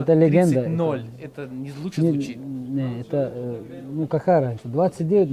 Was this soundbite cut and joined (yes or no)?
no